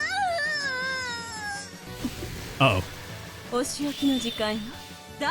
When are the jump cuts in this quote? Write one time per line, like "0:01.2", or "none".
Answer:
0:01.9